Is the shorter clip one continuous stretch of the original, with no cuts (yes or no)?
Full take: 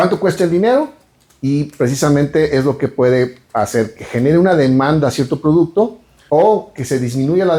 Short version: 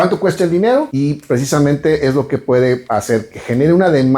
no